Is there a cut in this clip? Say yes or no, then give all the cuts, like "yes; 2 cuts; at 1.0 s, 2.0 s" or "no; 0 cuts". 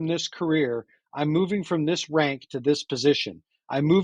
no; 0 cuts